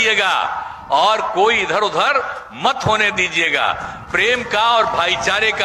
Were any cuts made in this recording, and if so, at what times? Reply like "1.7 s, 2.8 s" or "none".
none